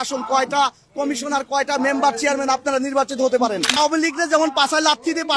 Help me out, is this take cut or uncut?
cut